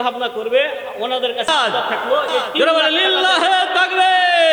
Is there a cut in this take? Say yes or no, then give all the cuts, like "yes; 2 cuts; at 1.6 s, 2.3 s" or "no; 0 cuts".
yes; 1 cut; at 2.5 s